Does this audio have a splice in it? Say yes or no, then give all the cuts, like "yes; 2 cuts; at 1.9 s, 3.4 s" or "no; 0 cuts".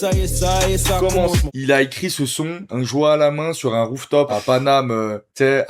yes; 3 cuts; at 1.5 s, 2.6 s, 4.3 s